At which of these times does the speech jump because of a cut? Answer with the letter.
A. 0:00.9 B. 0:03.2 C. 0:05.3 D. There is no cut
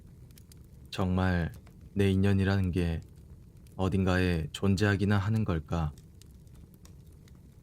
A